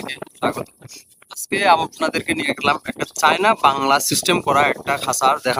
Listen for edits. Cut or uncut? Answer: uncut